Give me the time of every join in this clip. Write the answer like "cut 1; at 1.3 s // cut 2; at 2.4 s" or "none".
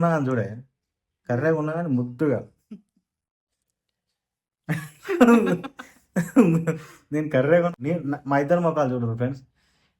cut 1; at 7.7 s